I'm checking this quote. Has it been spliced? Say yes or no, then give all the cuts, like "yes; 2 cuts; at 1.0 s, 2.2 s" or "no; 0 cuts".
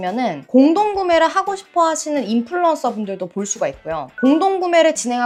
no; 0 cuts